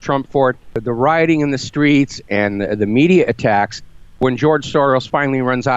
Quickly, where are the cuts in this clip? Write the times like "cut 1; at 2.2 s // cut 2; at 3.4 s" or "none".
cut 1; at 0.8 s // cut 2; at 4.2 s